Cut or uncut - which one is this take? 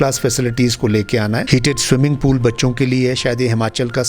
cut